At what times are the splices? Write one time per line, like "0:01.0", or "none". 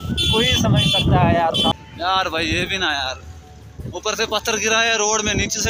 0:01.7